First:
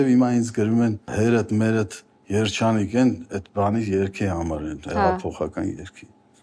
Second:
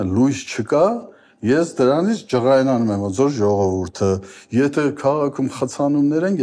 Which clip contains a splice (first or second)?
first